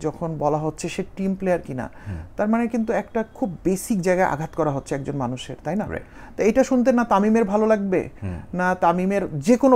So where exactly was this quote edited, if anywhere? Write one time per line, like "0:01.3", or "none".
none